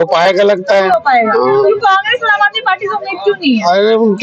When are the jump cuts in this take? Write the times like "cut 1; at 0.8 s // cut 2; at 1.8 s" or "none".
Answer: none